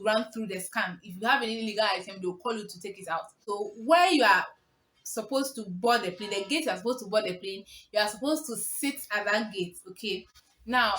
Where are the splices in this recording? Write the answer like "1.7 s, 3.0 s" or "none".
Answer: 3.4 s